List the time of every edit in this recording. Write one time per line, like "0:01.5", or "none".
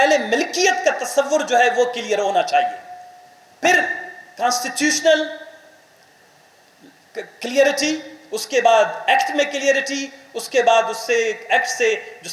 none